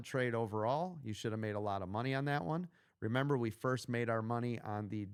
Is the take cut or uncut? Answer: uncut